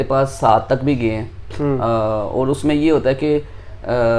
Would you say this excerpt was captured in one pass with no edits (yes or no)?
yes